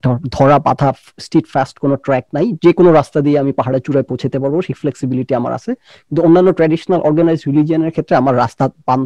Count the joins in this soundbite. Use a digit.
0